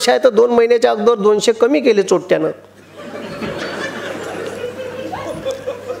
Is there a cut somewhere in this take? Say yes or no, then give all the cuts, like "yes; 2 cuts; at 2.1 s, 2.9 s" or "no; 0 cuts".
no; 0 cuts